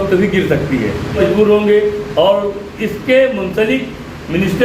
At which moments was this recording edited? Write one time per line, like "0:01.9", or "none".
0:01.2

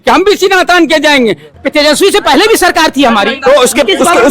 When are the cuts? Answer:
0:01.5

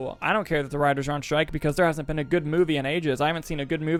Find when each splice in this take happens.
none

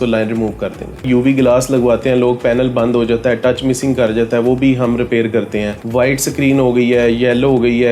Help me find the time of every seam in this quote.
0:01.0

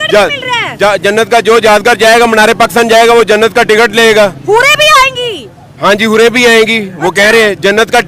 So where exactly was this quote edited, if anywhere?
none

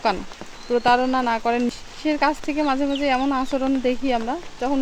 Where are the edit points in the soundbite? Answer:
0:01.7

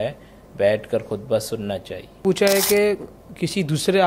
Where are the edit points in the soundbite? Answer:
0:02.2

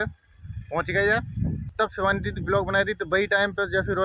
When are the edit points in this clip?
0:01.7

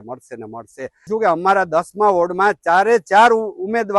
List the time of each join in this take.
0:01.1

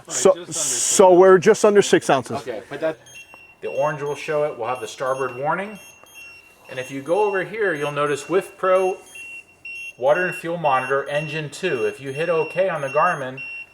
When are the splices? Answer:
0:02.9

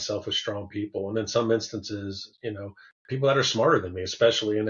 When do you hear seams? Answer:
none

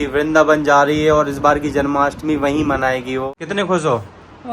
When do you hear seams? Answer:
0:03.3

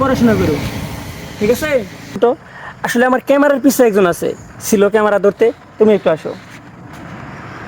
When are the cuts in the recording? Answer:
0:02.2

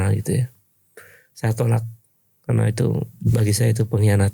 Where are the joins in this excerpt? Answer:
none

